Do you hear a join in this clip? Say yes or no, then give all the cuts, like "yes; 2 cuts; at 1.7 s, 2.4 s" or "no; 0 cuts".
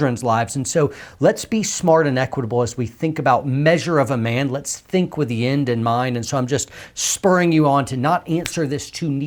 no; 0 cuts